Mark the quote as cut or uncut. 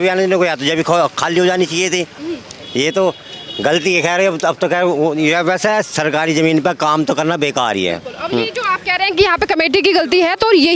uncut